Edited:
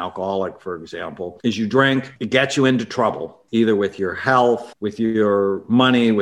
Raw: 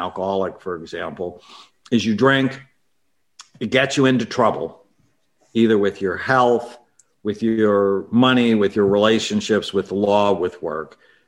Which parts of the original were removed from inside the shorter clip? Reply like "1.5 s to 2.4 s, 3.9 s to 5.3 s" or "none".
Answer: 1.3 s to 1.8 s, 2.6 s to 3.6 s, 4.7 s to 5.3 s, 6.8 s to 7.2 s